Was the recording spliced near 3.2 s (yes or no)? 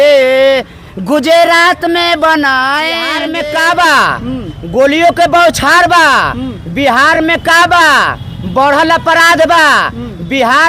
yes